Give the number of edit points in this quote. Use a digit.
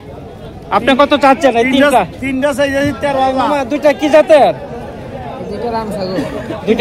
1